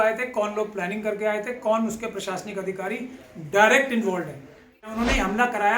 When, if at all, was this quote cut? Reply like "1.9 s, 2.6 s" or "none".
4.9 s